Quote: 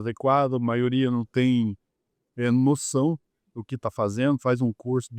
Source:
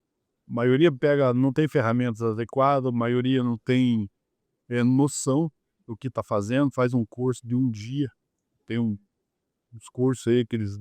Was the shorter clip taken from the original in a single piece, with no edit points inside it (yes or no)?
yes